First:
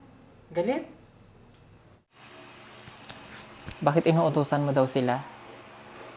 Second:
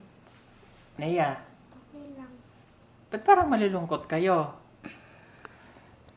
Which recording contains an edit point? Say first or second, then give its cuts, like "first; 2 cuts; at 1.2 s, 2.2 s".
first; 1 cut; at 2.1 s